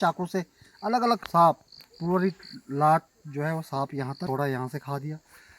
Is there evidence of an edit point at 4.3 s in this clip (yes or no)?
yes